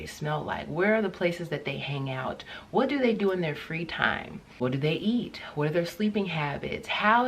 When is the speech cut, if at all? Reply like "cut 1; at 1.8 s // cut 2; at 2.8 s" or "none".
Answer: cut 1; at 4.4 s

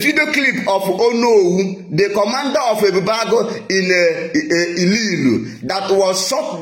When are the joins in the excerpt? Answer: none

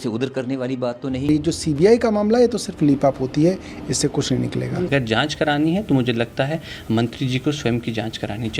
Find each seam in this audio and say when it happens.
cut 1; at 1.3 s // cut 2; at 4.9 s

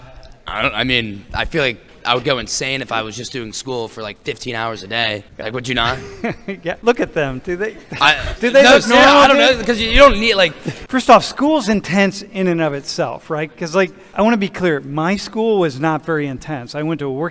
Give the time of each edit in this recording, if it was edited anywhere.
cut 1; at 5.3 s // cut 2; at 6.8 s // cut 3; at 10.7 s

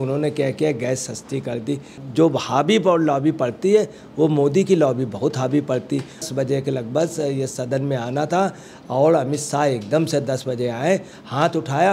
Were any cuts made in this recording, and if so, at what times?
cut 1; at 2.0 s // cut 2; at 6.3 s

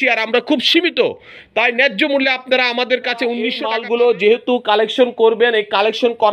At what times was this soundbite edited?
cut 1; at 3.7 s

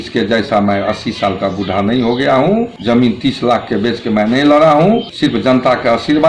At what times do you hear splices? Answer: cut 1; at 2.7 s // cut 2; at 5.1 s

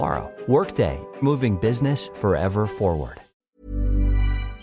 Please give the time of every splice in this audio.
cut 1; at 3.4 s

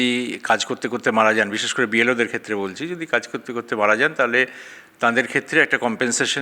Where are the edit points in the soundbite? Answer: none

